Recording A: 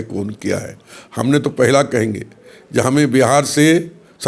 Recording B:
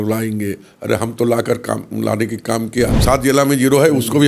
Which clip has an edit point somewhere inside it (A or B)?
B